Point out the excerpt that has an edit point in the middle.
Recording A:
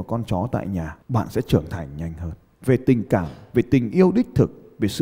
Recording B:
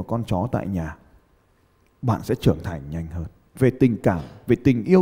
A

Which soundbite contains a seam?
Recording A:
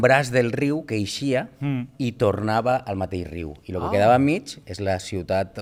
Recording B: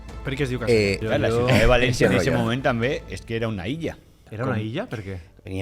B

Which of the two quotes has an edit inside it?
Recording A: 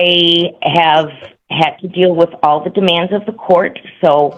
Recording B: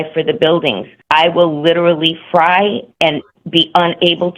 B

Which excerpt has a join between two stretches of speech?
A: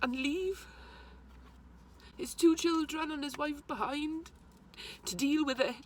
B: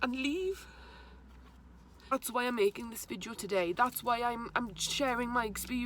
B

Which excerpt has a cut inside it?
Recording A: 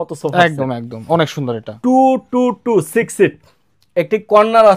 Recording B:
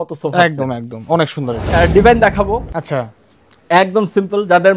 B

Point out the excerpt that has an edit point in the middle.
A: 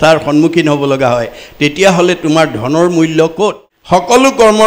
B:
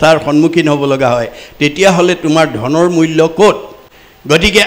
A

